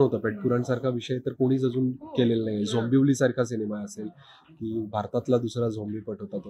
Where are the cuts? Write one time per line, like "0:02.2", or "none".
none